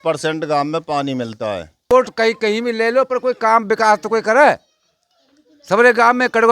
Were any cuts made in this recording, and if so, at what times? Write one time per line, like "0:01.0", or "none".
0:01.9

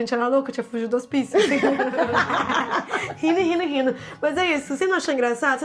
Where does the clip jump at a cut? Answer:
none

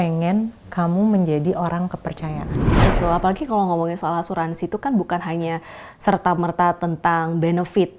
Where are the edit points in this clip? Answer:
0:02.7

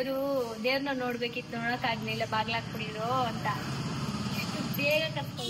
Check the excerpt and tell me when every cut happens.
none

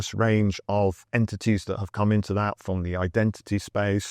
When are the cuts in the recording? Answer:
0:01.0

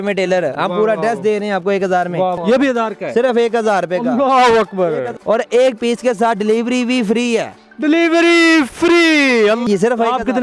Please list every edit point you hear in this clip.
0:02.4
0:05.1
0:09.6

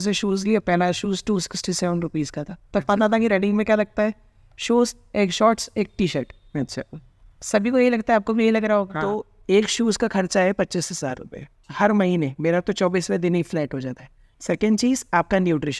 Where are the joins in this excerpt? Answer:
0:09.3
0:14.2

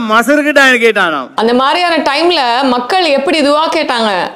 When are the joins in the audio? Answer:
0:01.2

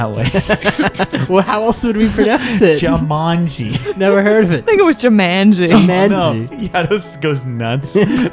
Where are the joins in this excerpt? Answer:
0:01.2
0:06.5

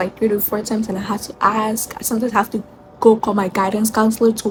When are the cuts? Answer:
none

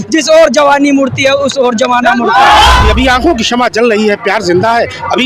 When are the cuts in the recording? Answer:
0:02.8

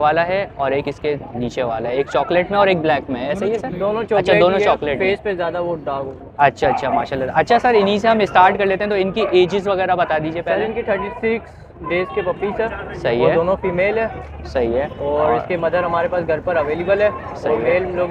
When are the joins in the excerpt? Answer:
none

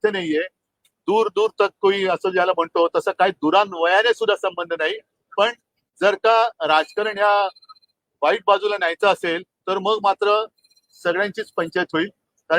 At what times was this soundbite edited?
none

